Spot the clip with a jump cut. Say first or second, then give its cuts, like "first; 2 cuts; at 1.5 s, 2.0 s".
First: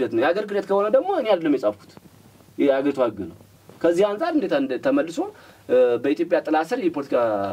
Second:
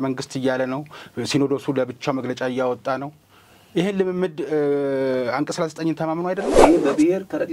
second; 1 cut; at 6.6 s